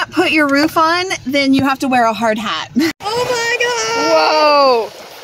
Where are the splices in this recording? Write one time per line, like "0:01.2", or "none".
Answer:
0:03.0

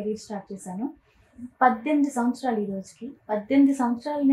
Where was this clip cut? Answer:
none

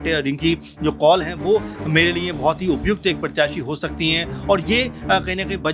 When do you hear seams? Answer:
none

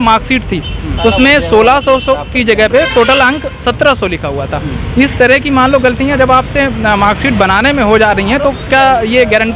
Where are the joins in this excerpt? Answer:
none

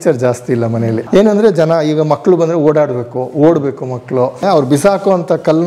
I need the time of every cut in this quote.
0:01.0
0:04.4

